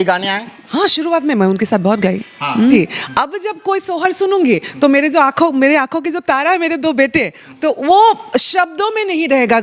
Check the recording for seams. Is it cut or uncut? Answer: cut